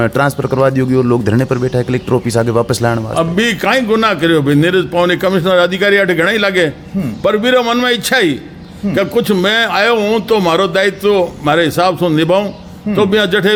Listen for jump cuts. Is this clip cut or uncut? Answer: uncut